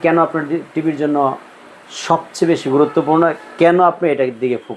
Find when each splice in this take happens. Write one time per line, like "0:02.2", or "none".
none